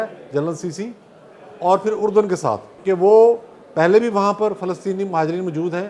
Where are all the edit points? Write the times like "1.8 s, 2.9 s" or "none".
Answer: 2.7 s

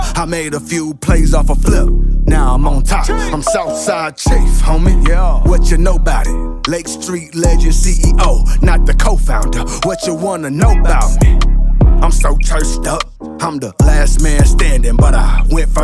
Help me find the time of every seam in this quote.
none

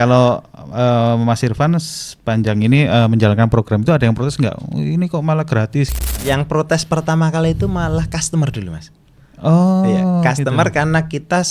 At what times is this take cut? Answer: 6.0 s

